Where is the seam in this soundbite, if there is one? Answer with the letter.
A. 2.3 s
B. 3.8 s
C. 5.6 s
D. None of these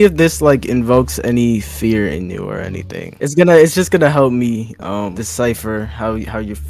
D